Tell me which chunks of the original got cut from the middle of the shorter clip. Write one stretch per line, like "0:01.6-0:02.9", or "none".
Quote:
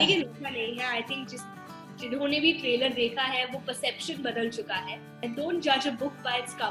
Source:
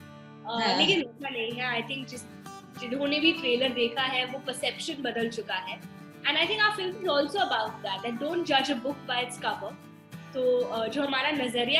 0:06.0-0:08.0